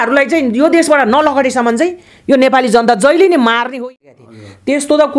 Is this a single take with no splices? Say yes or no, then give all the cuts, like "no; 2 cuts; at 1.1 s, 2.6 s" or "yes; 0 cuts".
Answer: no; 1 cut; at 3.9 s